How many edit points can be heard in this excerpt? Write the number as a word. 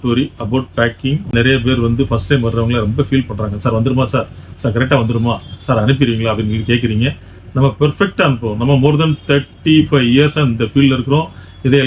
one